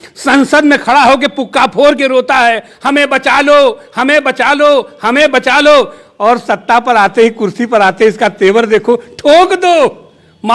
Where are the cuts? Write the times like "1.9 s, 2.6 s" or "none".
none

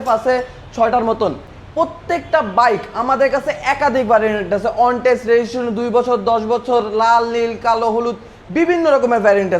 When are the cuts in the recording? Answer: none

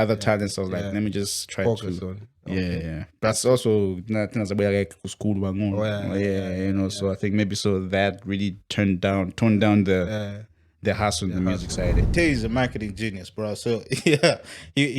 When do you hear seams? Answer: 12.0 s

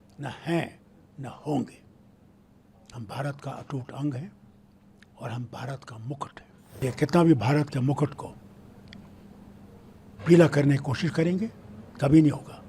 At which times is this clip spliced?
6.8 s

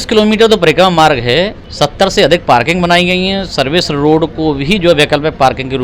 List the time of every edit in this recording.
1.6 s

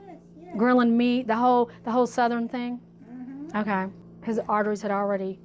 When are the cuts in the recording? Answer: 4.1 s

